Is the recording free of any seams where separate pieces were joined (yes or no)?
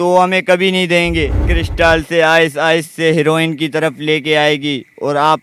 no